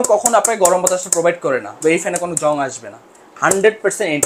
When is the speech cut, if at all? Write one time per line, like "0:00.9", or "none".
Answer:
0:01.8